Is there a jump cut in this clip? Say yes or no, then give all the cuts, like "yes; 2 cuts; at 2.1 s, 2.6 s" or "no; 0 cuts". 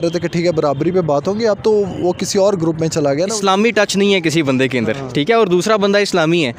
yes; 1 cut; at 3.3 s